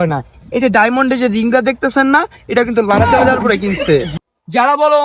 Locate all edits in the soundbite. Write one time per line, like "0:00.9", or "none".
0:04.1